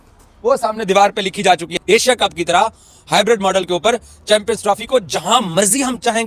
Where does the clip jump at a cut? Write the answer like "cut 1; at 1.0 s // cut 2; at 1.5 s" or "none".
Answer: none